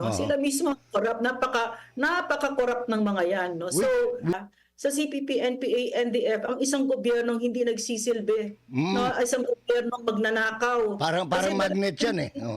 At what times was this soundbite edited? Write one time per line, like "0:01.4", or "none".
0:04.4